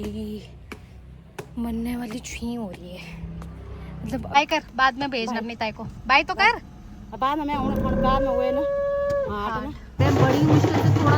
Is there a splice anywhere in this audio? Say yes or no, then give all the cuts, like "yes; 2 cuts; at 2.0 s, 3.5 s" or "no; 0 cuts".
yes; 2 cuts; at 4.4 s, 10.0 s